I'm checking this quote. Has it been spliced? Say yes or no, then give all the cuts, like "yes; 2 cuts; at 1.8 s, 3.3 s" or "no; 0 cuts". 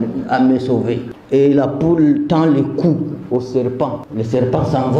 yes; 2 cuts; at 1.1 s, 4.0 s